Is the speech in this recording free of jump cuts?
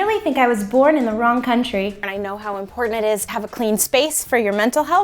no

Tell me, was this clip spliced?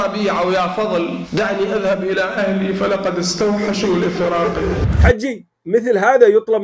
yes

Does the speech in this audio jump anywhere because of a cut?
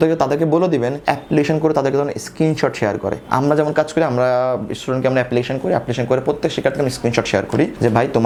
no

